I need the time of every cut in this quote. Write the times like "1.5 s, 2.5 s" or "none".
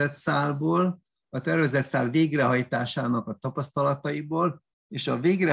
none

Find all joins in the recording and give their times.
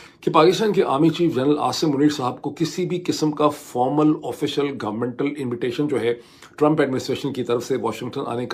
none

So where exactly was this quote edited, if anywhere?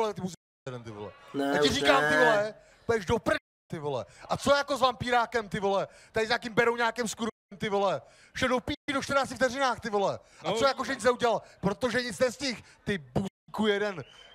none

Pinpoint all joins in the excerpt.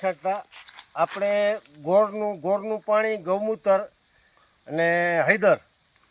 none

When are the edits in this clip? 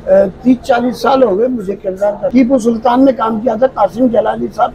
2.2 s

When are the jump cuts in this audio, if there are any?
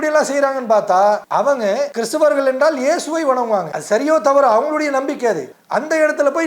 1.6 s, 3.7 s, 5.5 s

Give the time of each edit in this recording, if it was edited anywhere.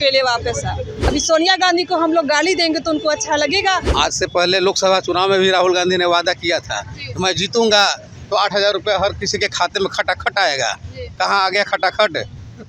0.9 s, 3.9 s

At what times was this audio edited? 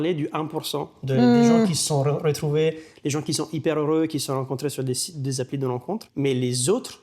6.1 s

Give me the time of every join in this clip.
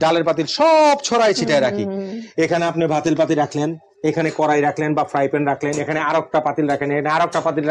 none

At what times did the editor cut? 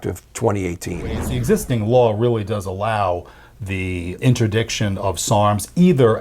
1.3 s, 4.2 s

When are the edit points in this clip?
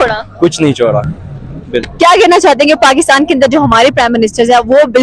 none

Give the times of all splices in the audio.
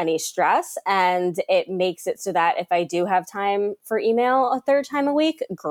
none

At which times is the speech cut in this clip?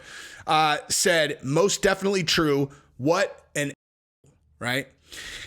3.9 s

